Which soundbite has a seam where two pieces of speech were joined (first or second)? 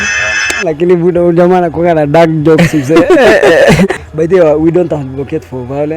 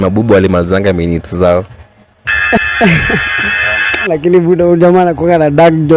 first